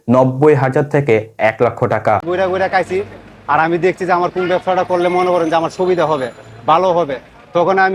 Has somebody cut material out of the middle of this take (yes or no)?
yes